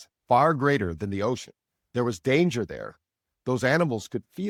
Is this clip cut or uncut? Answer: uncut